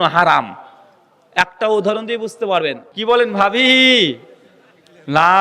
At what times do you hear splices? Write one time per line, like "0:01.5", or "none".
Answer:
0:02.9